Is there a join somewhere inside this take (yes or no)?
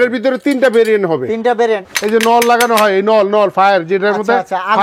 yes